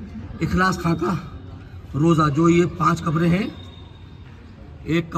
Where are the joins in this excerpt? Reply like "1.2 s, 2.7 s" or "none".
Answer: none